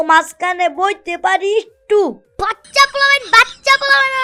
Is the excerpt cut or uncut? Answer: uncut